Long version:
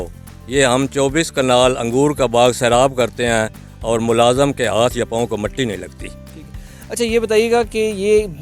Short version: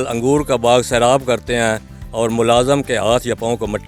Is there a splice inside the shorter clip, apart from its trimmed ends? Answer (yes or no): no